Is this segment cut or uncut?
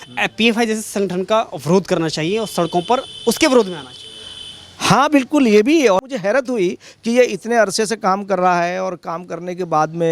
cut